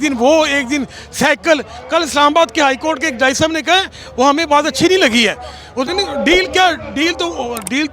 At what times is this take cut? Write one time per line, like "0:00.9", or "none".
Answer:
0:05.9